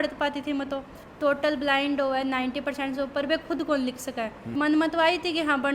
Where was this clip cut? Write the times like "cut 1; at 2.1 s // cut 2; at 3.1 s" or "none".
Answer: cut 1; at 1.0 s // cut 2; at 4.4 s